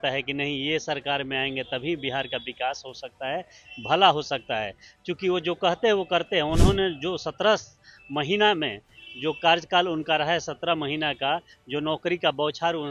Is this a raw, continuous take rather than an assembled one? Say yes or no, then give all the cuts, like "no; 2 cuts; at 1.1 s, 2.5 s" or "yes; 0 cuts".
yes; 0 cuts